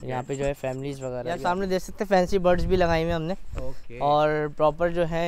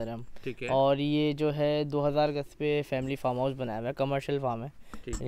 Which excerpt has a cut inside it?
first; 1 cut; at 1.3 s

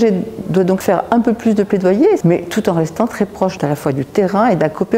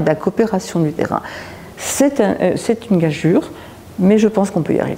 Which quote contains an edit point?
first; 3 cuts; at 0.8 s, 2.2 s, 3.6 s

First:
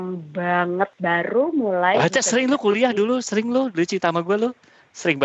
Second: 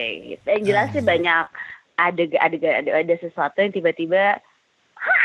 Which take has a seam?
first; 1 cut; at 0.9 s

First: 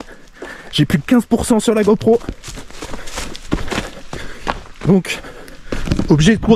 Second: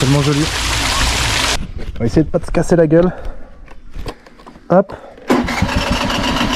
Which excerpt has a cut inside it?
second; 1 cut; at 1.6 s

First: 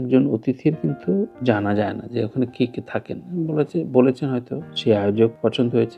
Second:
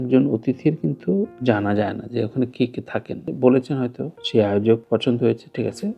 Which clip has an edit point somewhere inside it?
second; 1 cut; at 3.3 s

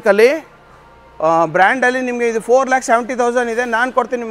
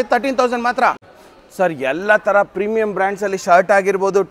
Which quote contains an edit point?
second; 1 cut; at 1.0 s

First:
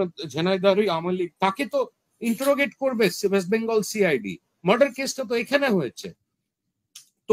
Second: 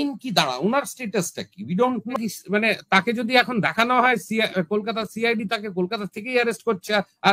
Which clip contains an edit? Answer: second; 1 cut; at 2.2 s

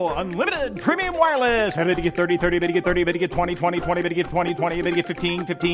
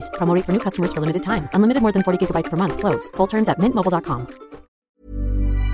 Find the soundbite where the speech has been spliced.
second; 1 cut; at 4.8 s

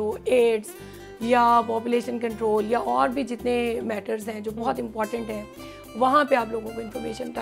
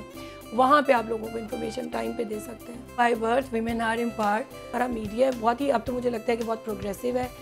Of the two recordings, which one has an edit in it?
second; 2 cuts; at 3.0 s, 4.7 s

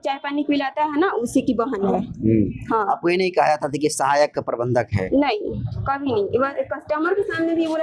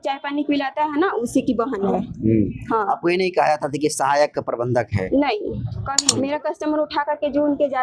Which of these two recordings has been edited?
second; 1 cut; at 5.9 s

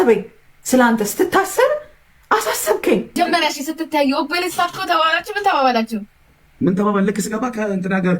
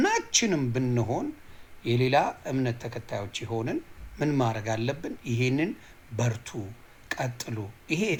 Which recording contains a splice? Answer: first; 1 cut; at 3.1 s

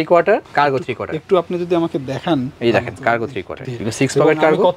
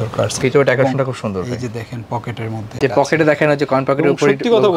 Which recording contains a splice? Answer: second; 1 cut; at 2.7 s

